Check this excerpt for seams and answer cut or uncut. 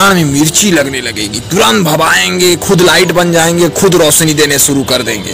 uncut